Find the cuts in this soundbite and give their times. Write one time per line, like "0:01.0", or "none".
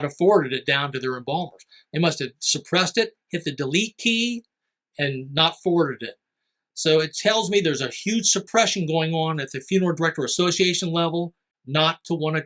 0:11.5